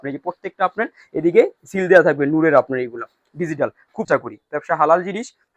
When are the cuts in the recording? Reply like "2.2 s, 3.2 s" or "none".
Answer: 4.1 s